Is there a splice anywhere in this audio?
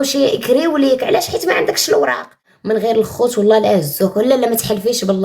yes; 1 cut; at 2.5 s

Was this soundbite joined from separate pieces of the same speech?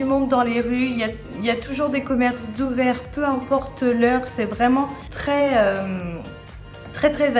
no; 0 cuts

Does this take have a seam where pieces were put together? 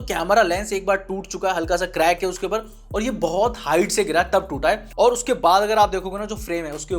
no; 0 cuts

